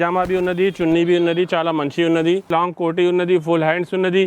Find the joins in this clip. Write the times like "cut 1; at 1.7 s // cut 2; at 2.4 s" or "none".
cut 1; at 2.5 s